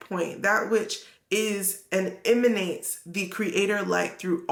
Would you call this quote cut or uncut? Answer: uncut